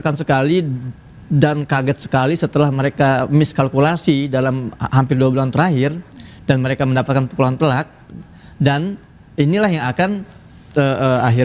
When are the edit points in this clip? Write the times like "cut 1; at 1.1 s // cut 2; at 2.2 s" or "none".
none